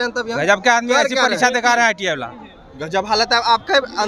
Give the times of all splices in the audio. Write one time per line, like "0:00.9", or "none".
none